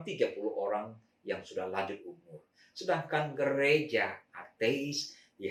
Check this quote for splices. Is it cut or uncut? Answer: uncut